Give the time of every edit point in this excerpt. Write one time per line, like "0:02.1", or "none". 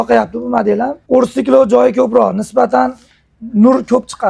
0:01.0